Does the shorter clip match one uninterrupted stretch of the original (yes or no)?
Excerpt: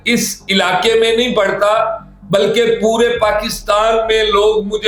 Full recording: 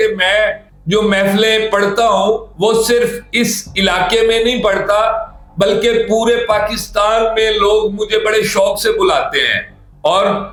yes